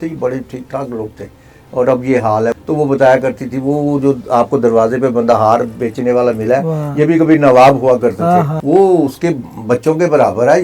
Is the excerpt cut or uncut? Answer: cut